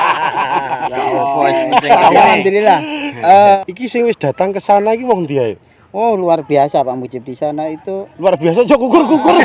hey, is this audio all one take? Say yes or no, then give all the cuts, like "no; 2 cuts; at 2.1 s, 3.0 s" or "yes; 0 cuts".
no; 1 cut; at 3.6 s